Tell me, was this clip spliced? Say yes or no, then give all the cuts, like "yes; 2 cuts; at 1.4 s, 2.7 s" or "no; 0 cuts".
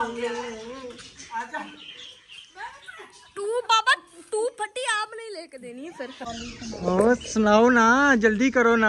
yes; 1 cut; at 6.3 s